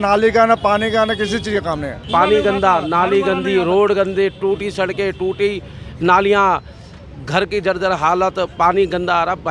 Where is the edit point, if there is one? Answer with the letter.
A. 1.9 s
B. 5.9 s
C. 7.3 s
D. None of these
A